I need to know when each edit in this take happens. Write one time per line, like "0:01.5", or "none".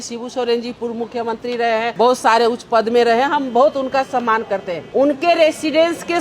0:01.9
0:04.8